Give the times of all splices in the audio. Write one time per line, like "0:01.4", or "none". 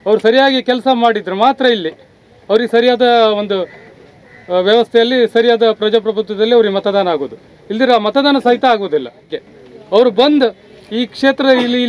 0:09.2